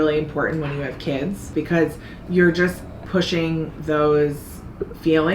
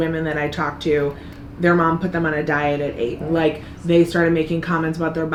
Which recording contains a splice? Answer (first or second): first